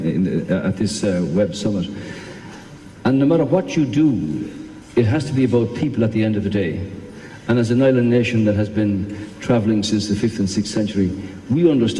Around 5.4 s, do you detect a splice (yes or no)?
yes